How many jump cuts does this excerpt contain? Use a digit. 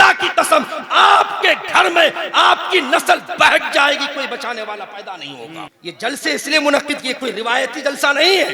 1